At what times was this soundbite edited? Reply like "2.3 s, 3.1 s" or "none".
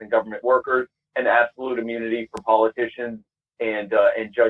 none